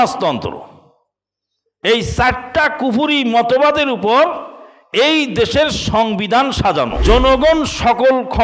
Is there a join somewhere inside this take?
yes; 1 cut; at 7.0 s

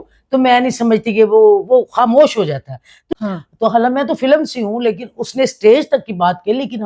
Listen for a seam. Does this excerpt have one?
yes; 1 cut; at 3.0 s

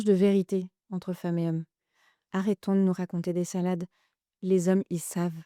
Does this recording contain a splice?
no; 0 cuts

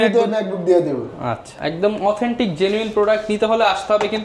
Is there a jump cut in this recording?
no; 0 cuts

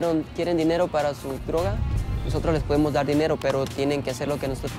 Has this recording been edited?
yes; 1 cut; at 1.9 s

